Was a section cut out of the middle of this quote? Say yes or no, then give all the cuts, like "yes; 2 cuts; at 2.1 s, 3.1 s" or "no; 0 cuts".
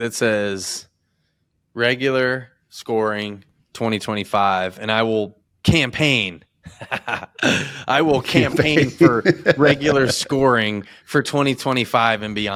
no; 0 cuts